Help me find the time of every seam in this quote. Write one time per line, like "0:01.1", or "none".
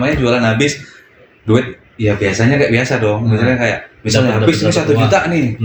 none